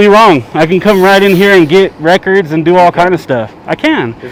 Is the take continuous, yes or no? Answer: yes